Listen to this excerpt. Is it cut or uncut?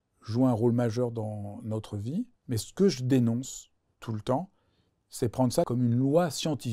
cut